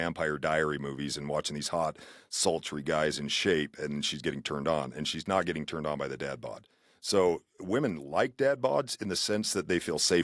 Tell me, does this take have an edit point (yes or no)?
no